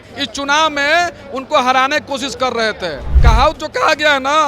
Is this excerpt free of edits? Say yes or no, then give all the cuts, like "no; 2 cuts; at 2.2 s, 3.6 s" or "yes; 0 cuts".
no; 1 cut; at 3.1 s